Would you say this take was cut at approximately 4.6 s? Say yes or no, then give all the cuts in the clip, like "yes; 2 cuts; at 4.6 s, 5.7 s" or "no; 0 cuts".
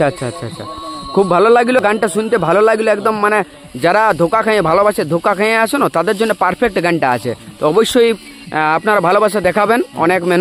no; 0 cuts